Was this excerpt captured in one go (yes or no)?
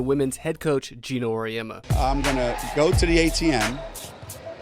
no